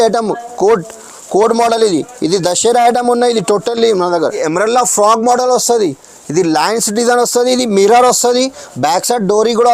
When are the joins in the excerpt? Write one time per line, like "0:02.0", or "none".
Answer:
0:04.4

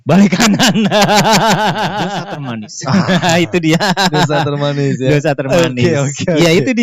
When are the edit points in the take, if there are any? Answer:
0:02.3

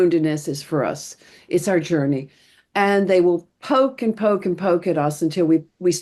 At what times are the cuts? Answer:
none

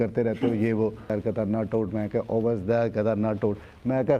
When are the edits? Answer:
0:01.1

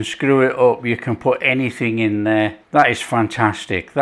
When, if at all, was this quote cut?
0:02.6

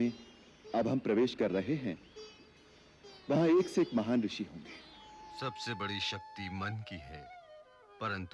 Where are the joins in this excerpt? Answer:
0:05.2

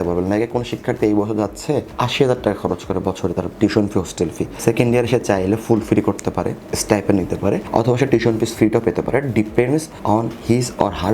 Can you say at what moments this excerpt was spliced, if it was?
0:01.9
0:04.5
0:07.7
0:09.9

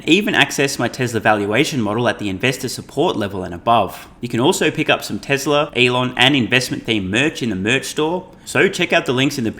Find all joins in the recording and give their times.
0:04.1
0:05.7
0:08.4

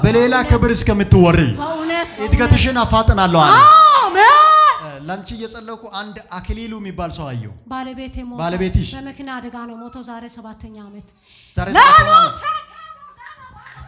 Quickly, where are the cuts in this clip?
0:02.1

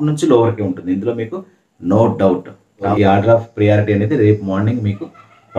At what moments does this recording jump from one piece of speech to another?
0:02.9

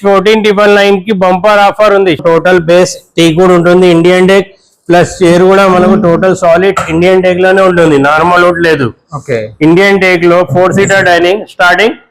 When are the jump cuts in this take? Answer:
0:02.2

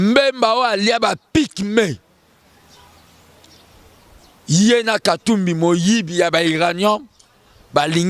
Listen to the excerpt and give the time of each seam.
none

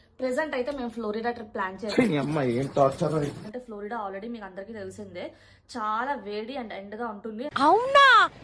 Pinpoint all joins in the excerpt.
0:01.9
0:03.5
0:07.5

